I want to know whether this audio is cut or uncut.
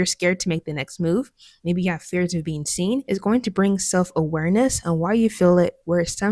cut